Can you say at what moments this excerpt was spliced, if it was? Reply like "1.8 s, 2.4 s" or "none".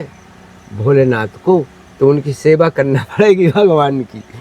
1.8 s